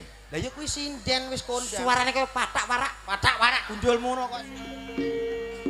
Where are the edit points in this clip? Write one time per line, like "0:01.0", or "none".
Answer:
0:04.4